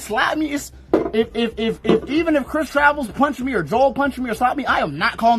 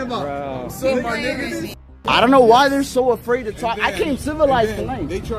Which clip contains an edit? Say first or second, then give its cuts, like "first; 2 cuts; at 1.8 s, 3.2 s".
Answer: second; 1 cut; at 1.8 s